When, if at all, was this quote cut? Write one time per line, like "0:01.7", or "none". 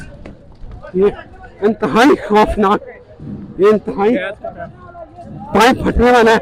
none

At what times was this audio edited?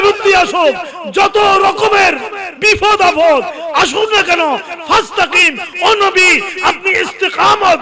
none

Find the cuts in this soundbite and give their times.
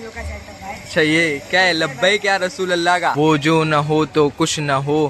0:03.1

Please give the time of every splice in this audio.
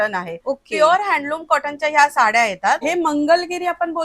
0:02.8

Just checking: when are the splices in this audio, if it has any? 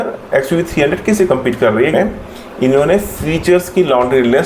0:01.9

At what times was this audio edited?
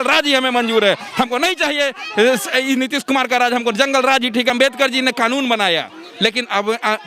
0:04.5

